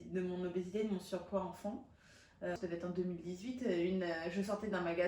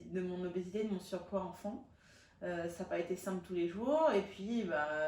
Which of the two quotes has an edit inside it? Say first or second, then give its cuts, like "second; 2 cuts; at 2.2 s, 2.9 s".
first; 1 cut; at 2.6 s